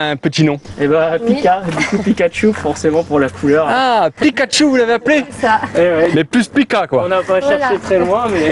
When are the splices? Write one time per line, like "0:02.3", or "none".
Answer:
none